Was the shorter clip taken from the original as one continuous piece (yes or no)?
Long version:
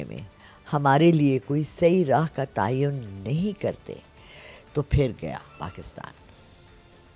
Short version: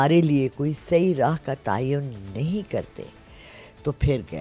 yes